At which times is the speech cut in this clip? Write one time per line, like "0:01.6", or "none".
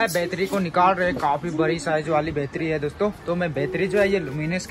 none